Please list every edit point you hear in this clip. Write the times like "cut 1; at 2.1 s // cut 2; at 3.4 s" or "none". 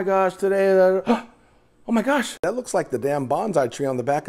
cut 1; at 2.4 s